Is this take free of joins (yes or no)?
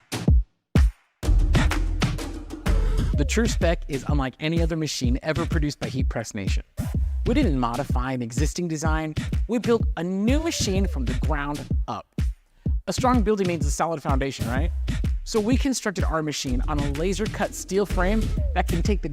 no